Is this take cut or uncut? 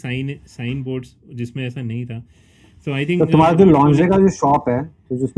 uncut